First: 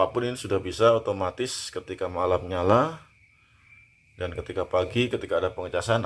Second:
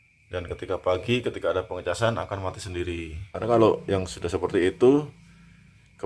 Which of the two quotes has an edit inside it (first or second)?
second